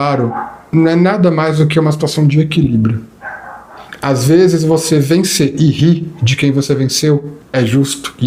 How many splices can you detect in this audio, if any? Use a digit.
1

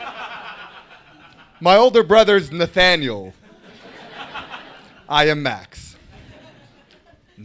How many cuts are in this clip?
1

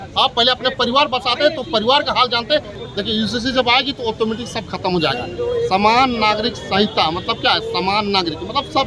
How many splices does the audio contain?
1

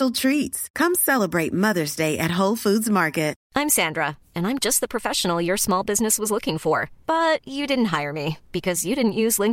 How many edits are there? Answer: 1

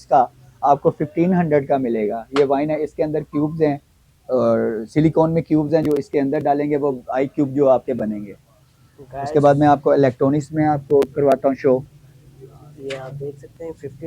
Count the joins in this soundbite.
0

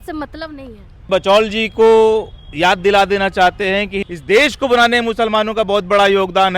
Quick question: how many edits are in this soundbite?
2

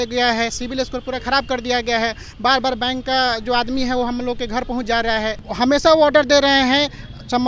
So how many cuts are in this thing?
1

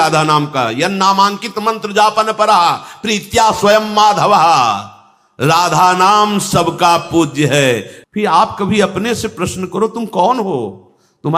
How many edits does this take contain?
1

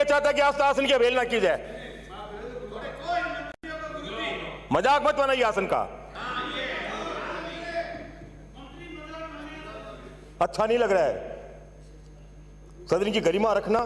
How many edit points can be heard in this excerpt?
0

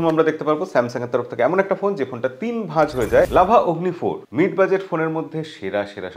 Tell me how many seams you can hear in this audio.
1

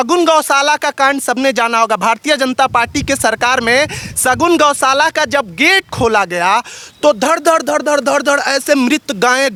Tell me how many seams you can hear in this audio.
0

